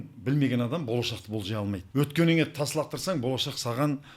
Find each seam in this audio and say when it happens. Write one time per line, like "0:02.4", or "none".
0:01.8